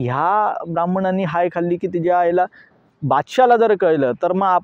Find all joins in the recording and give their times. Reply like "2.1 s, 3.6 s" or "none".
none